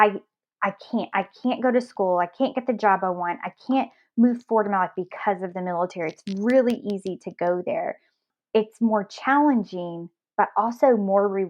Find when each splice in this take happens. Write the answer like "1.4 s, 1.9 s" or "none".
none